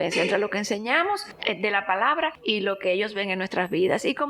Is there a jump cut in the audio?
yes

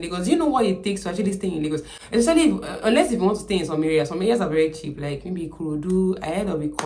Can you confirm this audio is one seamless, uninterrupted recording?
yes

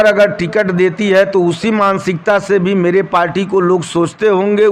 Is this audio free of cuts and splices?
yes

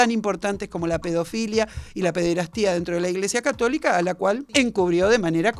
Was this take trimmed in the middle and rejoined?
yes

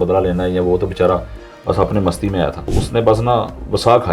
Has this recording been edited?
yes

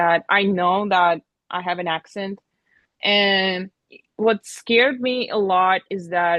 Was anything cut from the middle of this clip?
no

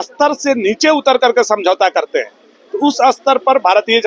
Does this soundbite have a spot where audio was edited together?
no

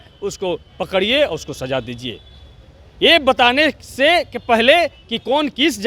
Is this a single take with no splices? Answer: yes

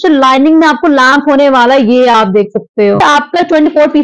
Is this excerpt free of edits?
no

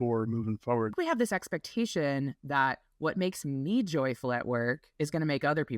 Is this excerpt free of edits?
no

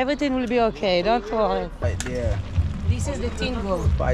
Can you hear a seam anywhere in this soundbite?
yes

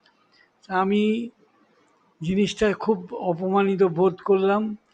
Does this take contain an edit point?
no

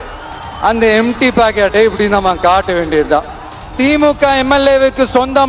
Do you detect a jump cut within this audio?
yes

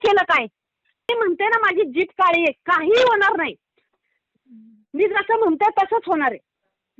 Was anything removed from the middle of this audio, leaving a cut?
yes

